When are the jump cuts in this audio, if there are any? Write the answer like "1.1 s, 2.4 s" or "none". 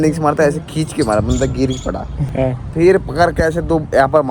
2.1 s